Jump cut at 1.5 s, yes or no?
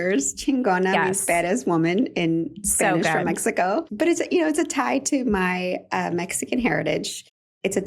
no